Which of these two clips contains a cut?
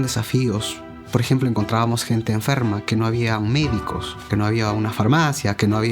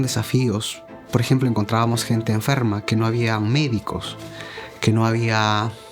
first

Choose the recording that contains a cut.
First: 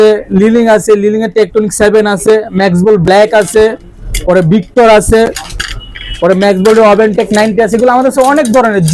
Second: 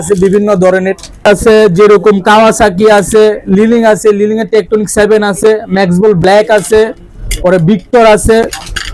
second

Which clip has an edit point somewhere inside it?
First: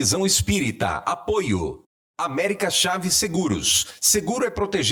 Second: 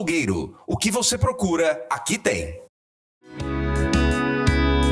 second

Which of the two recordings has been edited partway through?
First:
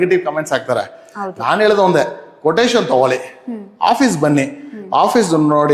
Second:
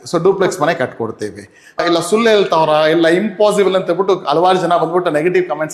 second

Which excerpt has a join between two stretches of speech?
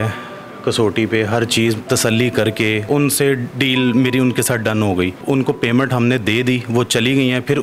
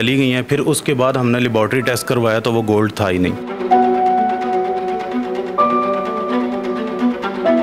first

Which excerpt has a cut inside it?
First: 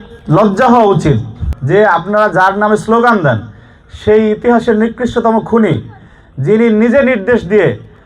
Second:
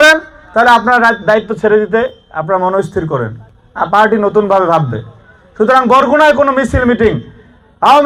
first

